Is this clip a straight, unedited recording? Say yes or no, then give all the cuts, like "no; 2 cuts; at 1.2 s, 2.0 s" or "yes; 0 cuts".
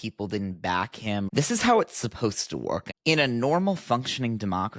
no; 2 cuts; at 1.3 s, 2.9 s